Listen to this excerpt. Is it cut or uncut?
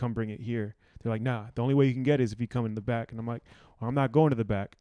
uncut